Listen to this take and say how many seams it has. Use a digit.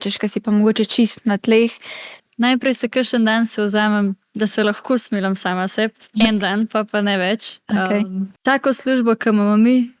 2